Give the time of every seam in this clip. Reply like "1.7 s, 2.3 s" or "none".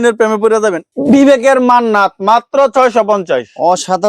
1.0 s